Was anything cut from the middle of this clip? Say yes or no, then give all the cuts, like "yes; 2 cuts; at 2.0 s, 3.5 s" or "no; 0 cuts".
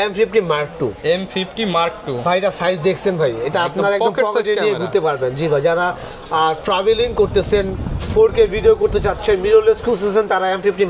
no; 0 cuts